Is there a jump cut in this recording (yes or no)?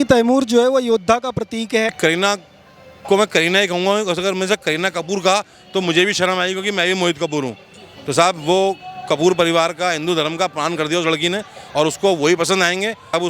no